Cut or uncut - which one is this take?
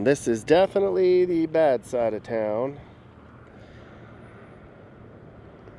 uncut